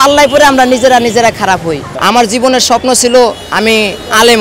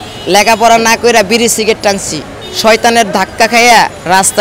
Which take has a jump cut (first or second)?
first